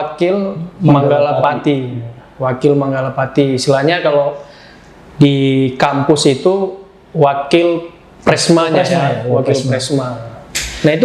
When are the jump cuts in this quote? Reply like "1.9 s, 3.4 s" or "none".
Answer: none

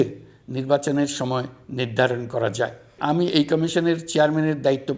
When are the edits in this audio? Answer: 3.0 s

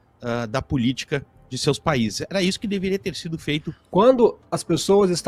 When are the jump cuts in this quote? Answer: 3.8 s

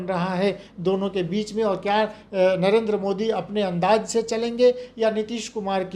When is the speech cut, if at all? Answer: none

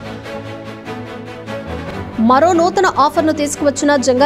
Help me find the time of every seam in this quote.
none

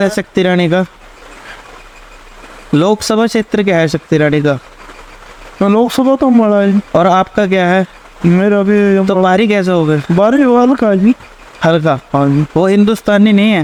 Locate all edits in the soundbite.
none

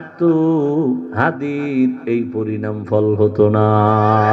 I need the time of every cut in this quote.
1.1 s

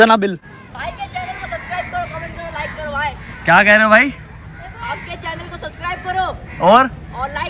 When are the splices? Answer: none

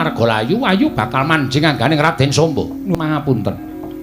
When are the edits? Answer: 2.9 s

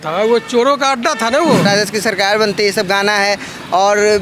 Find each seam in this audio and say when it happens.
1.6 s

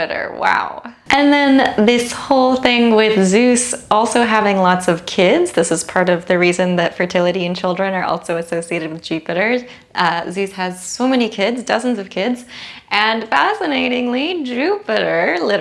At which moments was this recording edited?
none

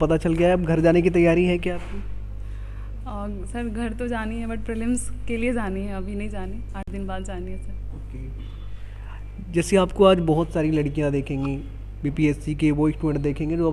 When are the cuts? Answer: none

